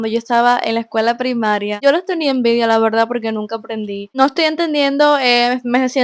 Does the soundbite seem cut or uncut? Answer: cut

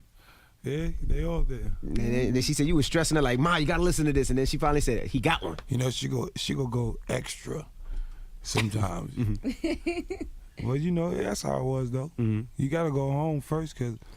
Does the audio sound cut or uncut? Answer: cut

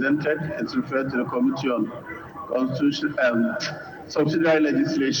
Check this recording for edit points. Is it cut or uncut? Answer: uncut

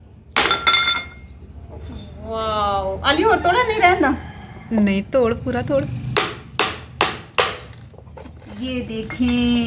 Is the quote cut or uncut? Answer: uncut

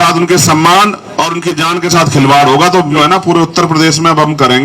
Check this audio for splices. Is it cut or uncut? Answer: cut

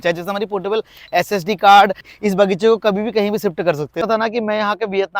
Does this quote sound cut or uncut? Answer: cut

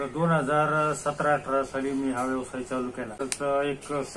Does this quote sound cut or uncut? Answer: cut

